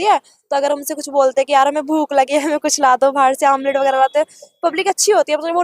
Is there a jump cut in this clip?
no; 0 cuts

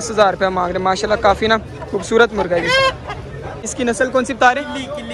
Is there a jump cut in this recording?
yes; 1 cut; at 3.7 s

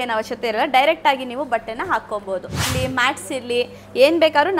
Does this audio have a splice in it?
yes; 1 cut; at 2.6 s

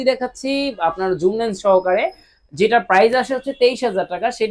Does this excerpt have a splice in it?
no; 0 cuts

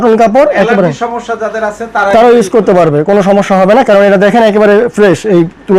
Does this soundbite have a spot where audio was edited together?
no; 0 cuts

